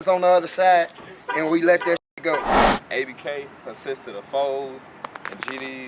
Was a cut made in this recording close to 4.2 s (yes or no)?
no